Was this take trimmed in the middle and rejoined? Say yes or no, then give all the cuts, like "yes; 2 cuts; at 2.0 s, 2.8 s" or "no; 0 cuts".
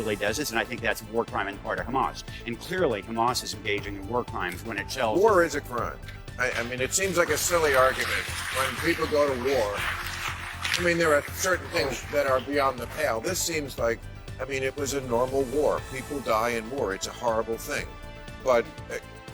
yes; 1 cut; at 1.5 s